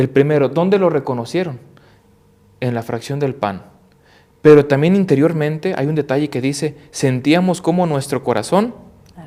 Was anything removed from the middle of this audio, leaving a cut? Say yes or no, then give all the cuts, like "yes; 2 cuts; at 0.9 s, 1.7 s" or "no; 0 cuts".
no; 0 cuts